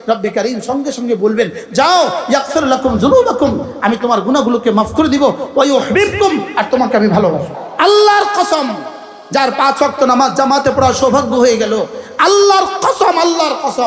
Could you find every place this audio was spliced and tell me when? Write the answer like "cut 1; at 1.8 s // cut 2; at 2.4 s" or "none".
cut 1; at 7.6 s